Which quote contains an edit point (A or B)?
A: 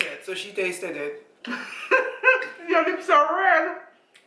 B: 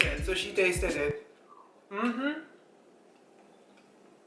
A